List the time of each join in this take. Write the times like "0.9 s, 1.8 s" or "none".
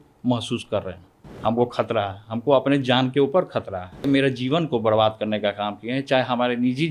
1.2 s, 4.1 s